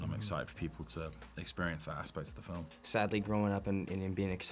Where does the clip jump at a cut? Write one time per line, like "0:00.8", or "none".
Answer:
0:02.7